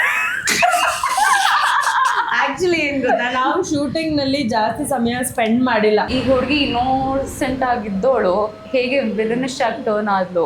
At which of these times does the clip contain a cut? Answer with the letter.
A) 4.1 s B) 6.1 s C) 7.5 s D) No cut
B